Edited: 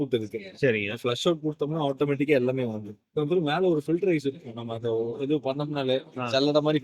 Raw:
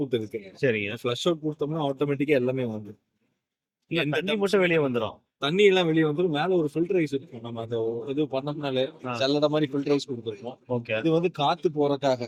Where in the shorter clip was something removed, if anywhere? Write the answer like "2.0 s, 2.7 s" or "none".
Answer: 3.2 s